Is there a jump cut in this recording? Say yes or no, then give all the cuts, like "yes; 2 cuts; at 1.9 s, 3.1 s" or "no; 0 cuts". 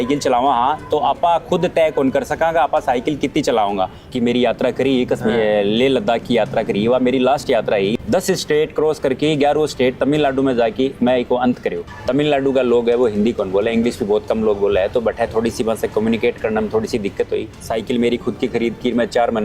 yes; 4 cuts; at 4.0 s, 8.0 s, 11.9 s, 17.6 s